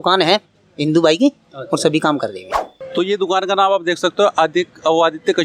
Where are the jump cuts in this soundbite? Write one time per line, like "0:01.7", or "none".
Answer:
0:02.8